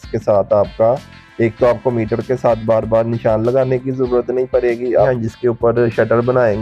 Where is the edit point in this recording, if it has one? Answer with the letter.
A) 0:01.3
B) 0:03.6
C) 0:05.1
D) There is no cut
C